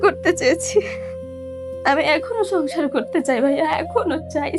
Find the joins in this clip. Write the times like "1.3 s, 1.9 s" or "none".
none